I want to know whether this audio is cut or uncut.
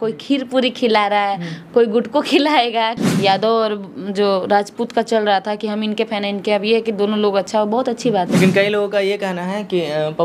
cut